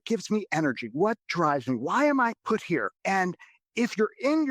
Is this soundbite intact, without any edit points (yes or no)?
no